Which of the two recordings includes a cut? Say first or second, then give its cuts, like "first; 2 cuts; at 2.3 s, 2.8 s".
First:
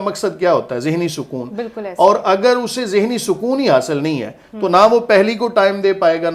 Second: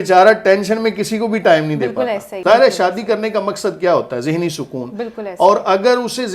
second; 1 cut; at 2.3 s